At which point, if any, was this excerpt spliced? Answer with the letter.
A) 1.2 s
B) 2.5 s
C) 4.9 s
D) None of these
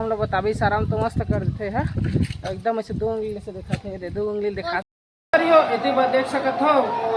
C